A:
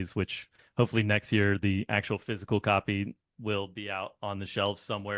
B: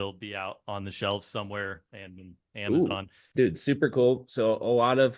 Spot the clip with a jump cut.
B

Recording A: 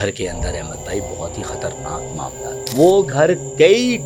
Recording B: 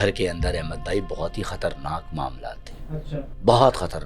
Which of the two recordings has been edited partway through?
A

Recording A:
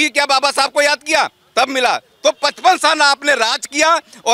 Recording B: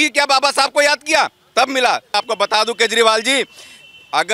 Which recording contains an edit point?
B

